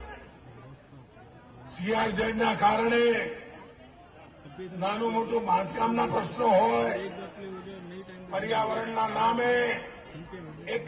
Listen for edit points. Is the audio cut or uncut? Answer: cut